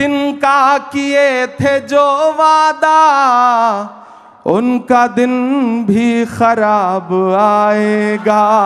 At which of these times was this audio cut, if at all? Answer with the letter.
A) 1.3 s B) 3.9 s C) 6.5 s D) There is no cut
D